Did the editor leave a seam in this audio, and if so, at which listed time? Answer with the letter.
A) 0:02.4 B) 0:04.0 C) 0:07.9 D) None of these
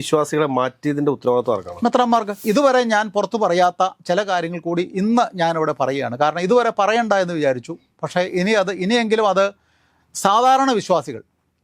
A